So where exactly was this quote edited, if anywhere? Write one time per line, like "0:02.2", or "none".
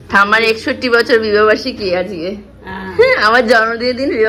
none